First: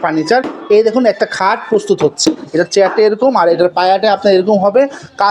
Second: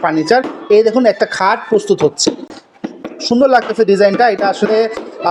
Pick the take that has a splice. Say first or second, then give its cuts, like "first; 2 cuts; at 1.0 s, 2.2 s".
first; 1 cut; at 2.4 s